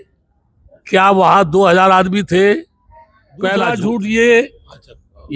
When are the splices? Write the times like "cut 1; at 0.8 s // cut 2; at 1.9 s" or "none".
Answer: cut 1; at 3.5 s